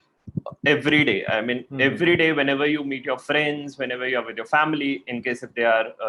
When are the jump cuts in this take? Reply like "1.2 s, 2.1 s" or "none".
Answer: none